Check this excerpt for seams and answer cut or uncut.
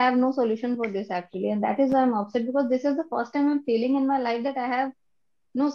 uncut